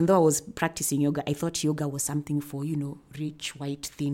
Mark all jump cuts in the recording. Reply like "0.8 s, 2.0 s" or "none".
none